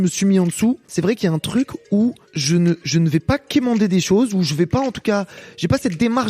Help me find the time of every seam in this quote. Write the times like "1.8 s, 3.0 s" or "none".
0.9 s, 2.3 s